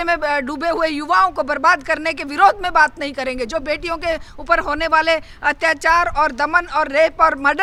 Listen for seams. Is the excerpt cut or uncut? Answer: uncut